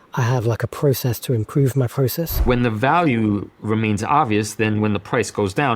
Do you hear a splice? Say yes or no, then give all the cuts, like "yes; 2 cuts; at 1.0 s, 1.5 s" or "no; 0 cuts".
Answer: yes; 1 cut; at 2.4 s